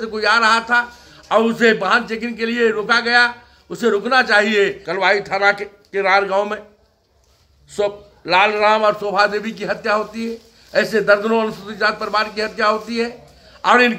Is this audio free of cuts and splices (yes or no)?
no